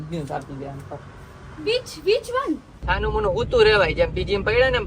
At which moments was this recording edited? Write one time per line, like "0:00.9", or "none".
0:02.7